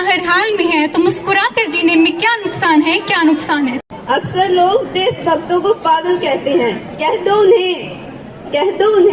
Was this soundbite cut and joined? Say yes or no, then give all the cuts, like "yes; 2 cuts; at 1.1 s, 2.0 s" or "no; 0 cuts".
yes; 1 cut; at 3.9 s